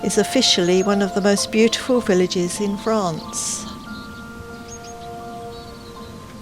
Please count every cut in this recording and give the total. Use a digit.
0